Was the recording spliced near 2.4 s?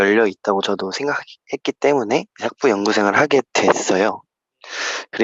yes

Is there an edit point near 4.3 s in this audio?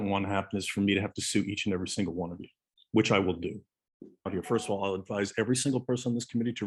no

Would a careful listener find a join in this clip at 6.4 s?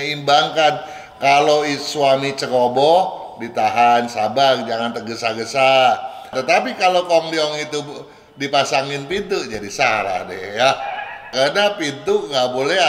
yes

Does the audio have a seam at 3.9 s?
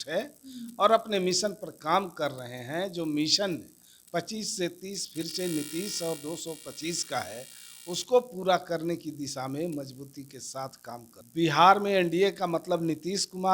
no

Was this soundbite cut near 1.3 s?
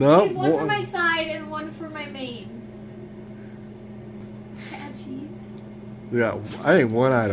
no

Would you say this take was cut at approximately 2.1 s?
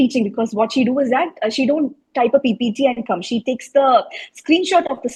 no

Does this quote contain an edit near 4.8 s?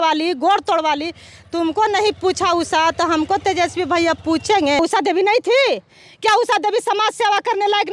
yes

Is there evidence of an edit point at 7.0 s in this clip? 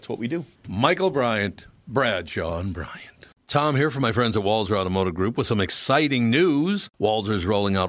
no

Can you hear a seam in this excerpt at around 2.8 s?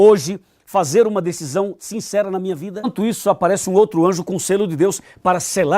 yes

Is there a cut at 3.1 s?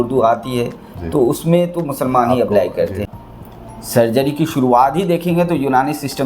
yes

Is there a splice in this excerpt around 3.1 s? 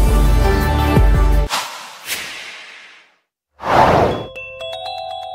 no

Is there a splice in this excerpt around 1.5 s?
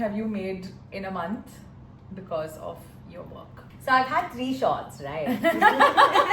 no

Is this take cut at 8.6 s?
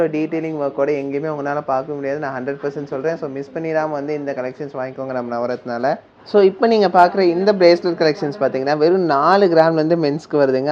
no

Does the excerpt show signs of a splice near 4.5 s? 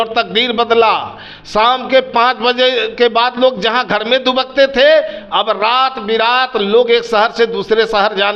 no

